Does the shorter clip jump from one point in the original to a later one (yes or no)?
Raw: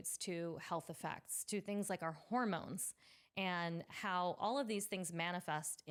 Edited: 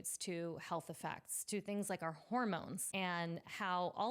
yes